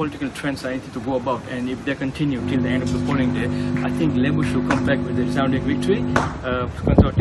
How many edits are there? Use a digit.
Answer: 0